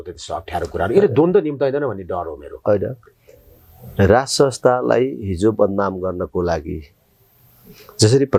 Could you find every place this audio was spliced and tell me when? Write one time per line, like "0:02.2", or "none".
none